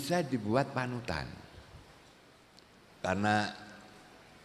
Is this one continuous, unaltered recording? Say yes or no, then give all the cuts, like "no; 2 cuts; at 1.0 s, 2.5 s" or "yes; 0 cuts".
no; 1 cut; at 2.8 s